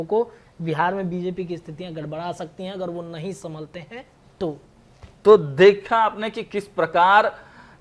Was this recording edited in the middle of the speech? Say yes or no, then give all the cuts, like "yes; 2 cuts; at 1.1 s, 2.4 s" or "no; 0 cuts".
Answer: no; 0 cuts